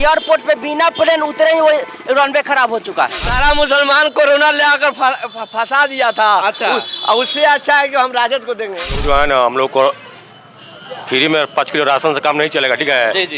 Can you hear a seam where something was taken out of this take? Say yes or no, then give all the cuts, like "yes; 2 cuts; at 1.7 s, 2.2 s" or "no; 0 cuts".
yes; 2 cuts; at 3.2 s, 8.9 s